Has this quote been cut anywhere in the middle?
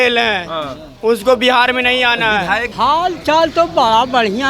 yes; 1 cut; at 2.7 s

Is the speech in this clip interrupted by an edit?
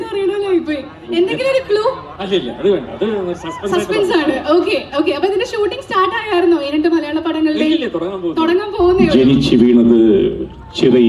yes; 1 cut; at 9.0 s

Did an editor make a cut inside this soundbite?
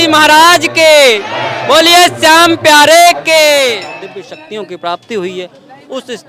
yes; 1 cut; at 3.9 s

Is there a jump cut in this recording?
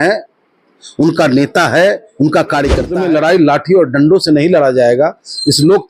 yes; 1 cut; at 2.9 s

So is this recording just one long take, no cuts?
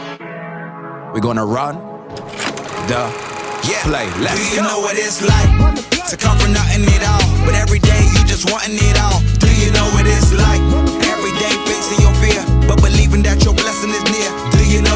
yes; 0 cuts

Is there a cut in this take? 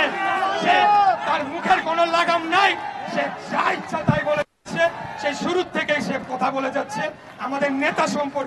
no; 0 cuts

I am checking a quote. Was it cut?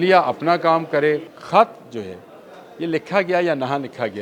yes; 1 cut; at 1.3 s

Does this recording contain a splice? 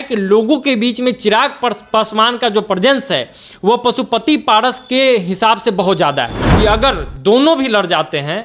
yes; 1 cut; at 6.4 s

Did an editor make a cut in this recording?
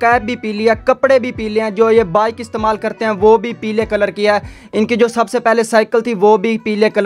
no; 0 cuts

